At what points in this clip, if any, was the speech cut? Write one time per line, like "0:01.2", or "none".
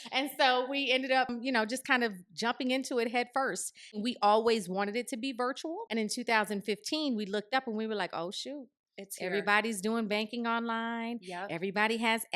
0:01.3
0:04.0
0:05.8